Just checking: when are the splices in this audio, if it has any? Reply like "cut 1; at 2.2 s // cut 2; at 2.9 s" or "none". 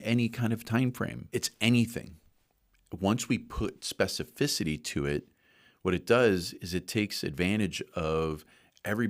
cut 1; at 1.2 s